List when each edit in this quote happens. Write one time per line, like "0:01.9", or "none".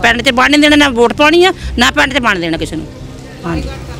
none